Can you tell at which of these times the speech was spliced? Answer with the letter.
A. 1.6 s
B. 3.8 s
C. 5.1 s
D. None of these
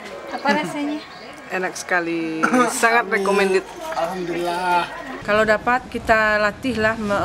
C